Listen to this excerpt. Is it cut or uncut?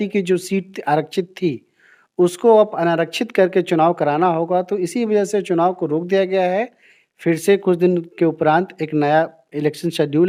uncut